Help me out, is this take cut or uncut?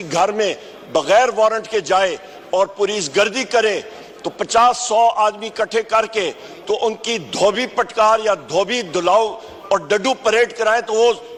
uncut